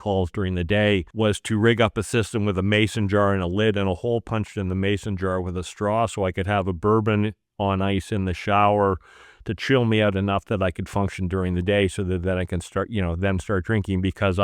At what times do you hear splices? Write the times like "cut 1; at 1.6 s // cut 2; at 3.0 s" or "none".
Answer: cut 1; at 1.1 s